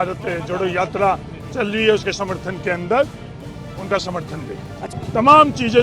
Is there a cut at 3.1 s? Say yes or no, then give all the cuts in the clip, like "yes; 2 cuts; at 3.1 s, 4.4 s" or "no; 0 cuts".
no; 1 cut; at 4.8 s